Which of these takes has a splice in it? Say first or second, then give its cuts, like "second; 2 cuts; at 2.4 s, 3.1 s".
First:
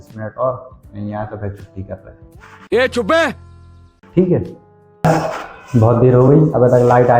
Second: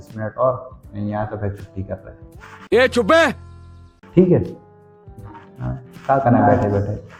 first; 1 cut; at 5.0 s